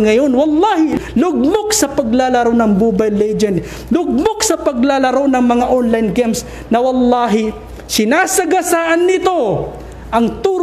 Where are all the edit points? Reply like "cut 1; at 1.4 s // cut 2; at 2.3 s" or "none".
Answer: cut 1; at 1.0 s